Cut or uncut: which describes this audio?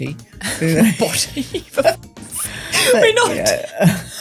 uncut